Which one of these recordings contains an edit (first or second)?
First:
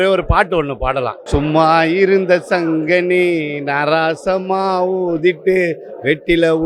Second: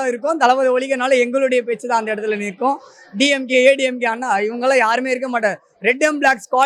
first